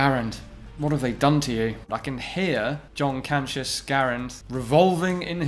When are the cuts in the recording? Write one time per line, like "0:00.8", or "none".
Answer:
0:01.9